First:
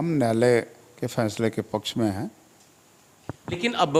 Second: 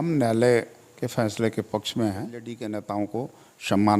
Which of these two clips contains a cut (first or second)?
second